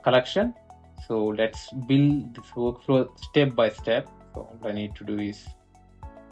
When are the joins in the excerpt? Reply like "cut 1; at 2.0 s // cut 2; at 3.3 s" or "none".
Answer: cut 1; at 5.4 s